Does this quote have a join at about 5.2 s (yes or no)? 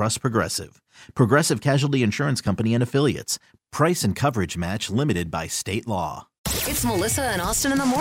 no